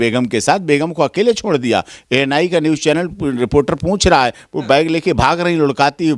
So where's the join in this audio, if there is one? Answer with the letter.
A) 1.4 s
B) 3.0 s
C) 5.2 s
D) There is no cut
D